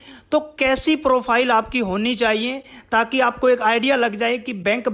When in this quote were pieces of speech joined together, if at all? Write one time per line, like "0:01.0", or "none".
none